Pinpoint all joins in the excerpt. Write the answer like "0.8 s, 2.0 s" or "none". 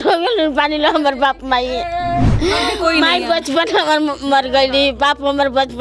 none

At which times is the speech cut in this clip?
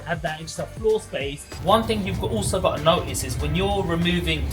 1.6 s

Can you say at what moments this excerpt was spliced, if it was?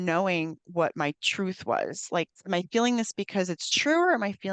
2.4 s

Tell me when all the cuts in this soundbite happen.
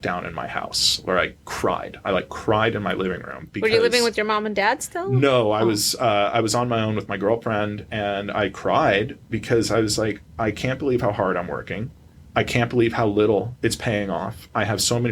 none

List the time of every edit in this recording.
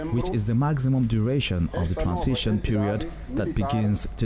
none

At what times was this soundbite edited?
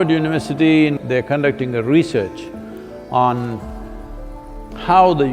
1.0 s

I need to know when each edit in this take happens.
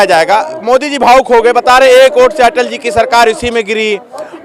none

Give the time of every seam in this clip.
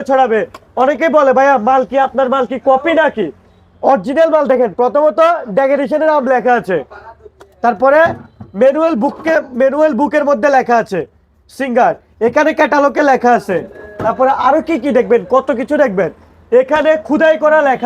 none

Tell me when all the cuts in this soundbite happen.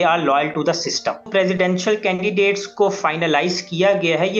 1.3 s

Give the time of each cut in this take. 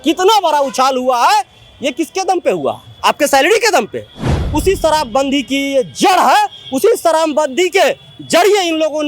4.4 s

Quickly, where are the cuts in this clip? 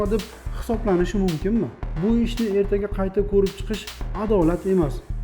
1.8 s

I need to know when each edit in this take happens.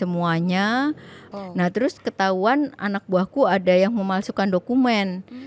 1.3 s

